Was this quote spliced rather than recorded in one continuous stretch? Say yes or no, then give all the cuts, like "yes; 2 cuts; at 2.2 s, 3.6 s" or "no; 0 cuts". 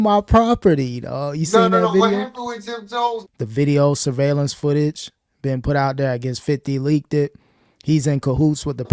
yes; 1 cut; at 3.3 s